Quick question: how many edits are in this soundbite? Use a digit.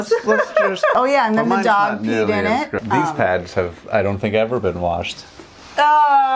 2